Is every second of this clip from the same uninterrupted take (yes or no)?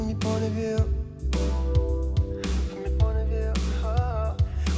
yes